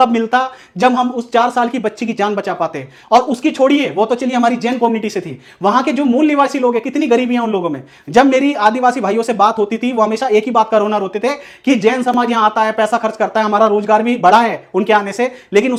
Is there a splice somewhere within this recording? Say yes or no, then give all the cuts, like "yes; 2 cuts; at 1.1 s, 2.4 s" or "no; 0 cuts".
no; 0 cuts